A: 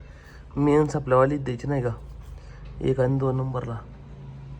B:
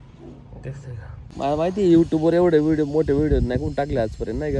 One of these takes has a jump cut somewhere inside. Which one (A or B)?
B